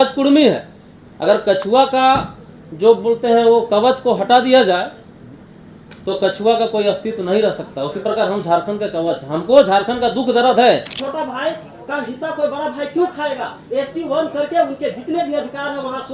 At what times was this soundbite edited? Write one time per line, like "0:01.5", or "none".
0:11.0